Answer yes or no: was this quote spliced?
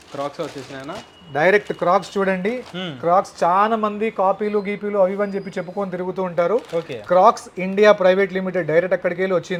no